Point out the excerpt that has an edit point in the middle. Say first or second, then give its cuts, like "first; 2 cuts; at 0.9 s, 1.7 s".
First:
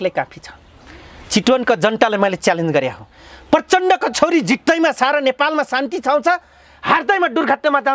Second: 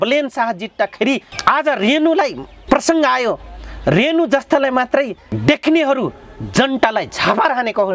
second; 3 cuts; at 1.3 s, 2.5 s, 5.2 s